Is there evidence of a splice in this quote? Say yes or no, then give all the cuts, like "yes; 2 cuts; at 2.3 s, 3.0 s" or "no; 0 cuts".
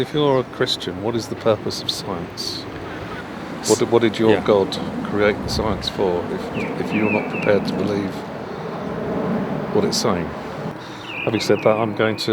yes; 2 cuts; at 3.2 s, 10.7 s